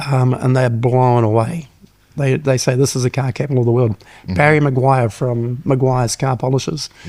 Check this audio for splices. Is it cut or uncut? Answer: uncut